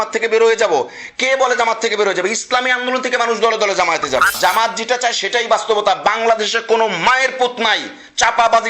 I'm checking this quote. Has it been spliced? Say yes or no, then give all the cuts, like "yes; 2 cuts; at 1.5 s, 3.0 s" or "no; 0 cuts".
yes; 1 cut; at 4.3 s